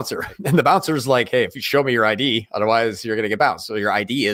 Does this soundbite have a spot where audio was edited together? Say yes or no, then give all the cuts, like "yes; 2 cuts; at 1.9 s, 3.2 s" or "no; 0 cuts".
no; 0 cuts